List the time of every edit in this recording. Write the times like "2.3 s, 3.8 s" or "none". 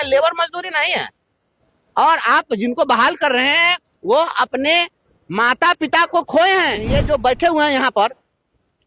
6.9 s